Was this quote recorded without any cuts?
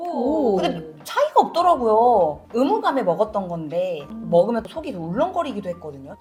yes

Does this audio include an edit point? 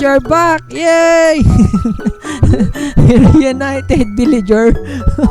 no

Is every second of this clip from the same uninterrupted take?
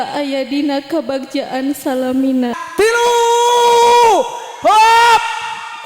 no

